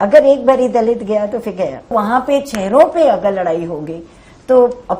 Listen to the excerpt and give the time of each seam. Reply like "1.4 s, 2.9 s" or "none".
1.9 s